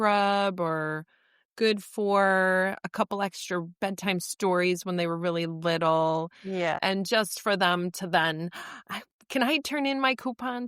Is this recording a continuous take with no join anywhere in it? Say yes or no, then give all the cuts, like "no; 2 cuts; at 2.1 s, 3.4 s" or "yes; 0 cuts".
no; 1 cut; at 6.8 s